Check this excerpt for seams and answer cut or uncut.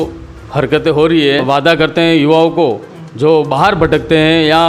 cut